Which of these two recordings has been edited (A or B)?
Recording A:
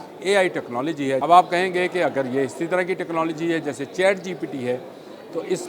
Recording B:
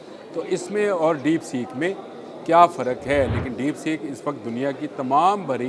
A